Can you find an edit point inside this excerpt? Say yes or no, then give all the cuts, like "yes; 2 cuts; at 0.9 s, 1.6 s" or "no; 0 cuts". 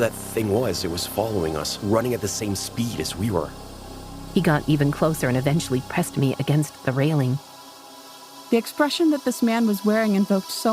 yes; 2 cuts; at 3.6 s, 8.0 s